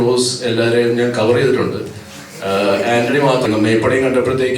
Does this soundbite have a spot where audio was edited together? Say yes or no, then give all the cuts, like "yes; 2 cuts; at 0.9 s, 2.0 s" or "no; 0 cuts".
yes; 1 cut; at 3.4 s